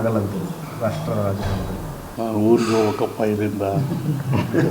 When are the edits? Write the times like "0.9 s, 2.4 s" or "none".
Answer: 2.0 s